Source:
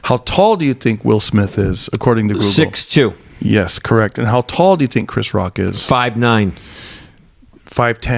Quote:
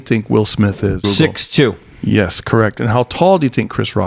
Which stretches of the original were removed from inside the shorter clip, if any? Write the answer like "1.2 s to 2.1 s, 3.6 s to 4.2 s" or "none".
1.8 s to 2.4 s

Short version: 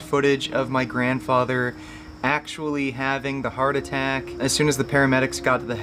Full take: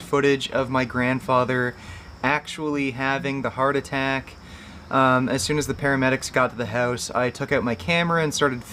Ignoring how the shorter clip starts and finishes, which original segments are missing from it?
4.4 s to 5.3 s

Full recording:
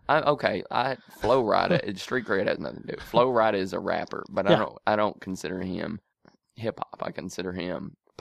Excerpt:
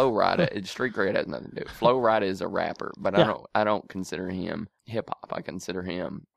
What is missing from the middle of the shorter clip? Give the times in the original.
6.1 s to 6.5 s

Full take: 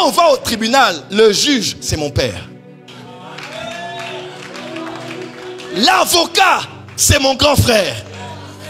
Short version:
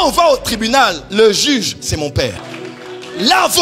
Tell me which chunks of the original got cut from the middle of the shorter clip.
2.5 s to 5.1 s

